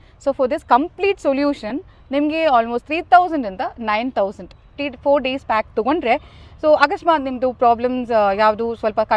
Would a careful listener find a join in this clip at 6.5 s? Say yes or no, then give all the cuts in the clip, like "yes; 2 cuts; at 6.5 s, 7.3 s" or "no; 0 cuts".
no; 1 cut; at 4.7 s